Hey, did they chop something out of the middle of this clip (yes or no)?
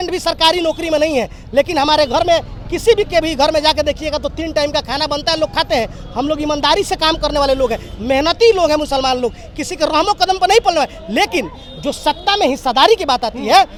no